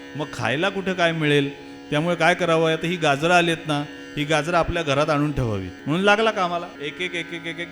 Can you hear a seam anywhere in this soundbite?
yes; 2 cuts; at 5.7 s, 6.7 s

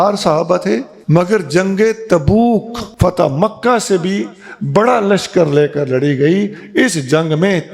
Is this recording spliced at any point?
yes; 2 cuts; at 0.9 s, 2.8 s

